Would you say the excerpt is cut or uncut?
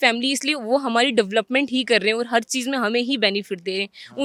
uncut